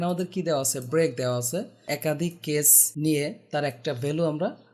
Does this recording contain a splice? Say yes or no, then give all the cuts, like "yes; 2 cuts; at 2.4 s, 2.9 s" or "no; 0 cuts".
yes; 2 cuts; at 1.9 s, 2.8 s